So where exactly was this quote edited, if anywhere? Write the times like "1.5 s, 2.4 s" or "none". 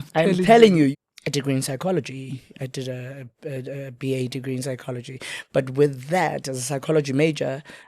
0.9 s